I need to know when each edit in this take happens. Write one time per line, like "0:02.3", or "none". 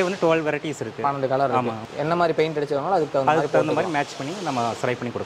0:01.8